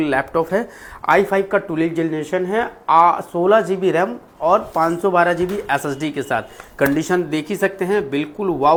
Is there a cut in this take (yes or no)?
no